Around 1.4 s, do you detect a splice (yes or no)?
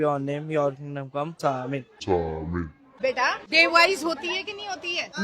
yes